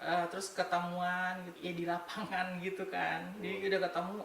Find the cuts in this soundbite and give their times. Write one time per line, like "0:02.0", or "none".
0:01.5